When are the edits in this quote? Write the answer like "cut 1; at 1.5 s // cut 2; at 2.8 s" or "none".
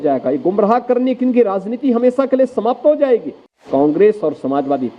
cut 1; at 3.7 s